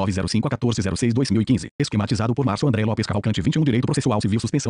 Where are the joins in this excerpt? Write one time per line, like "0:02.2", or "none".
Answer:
none

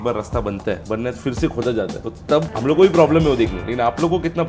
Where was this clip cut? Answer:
none

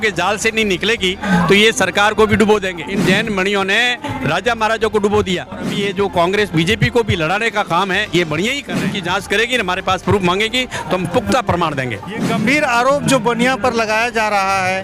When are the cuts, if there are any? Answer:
0:02.8
0:05.7
0:08.9
0:12.3

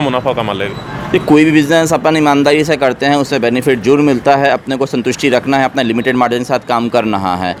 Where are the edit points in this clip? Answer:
none

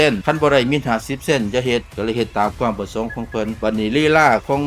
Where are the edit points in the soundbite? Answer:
0:01.9
0:03.6

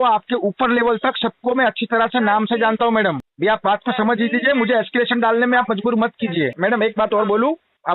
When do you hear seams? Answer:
0:03.3
0:06.5

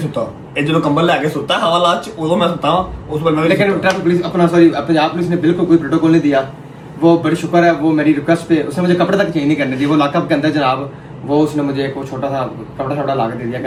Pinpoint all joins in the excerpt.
none

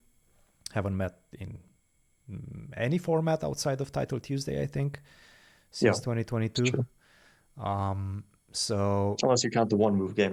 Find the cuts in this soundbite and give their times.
none

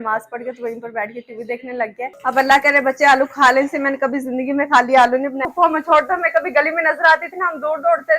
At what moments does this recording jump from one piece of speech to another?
0:02.2
0:05.5

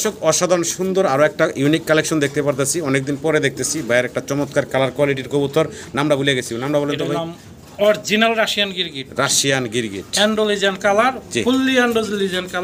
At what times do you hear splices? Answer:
none

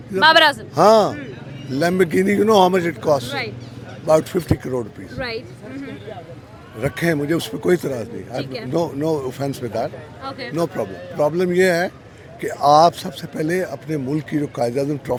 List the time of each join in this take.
none

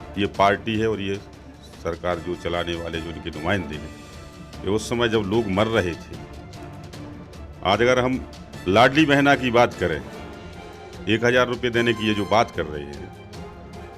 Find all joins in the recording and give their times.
0:06.1
0:07.6

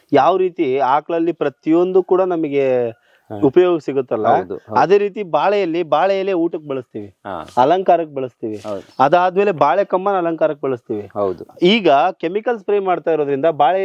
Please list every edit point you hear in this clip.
none

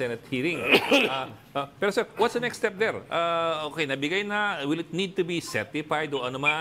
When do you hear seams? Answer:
none

